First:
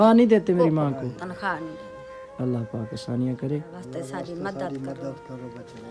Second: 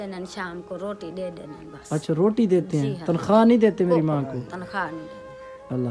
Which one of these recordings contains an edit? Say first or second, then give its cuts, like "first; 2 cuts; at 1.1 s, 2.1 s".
first; 1 cut; at 3.8 s